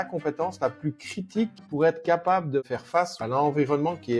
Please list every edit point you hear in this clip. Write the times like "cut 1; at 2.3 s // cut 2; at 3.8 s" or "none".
cut 1; at 1.6 s // cut 2; at 3.1 s